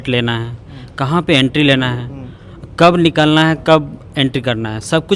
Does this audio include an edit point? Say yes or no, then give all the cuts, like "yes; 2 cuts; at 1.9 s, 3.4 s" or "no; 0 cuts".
no; 0 cuts